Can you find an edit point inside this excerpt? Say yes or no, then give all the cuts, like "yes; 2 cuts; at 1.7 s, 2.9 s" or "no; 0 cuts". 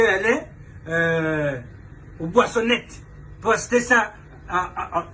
no; 0 cuts